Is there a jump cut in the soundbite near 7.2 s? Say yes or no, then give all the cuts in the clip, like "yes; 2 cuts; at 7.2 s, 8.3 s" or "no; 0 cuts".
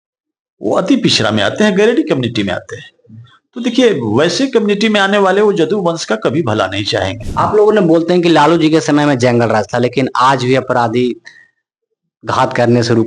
yes; 1 cut; at 7.2 s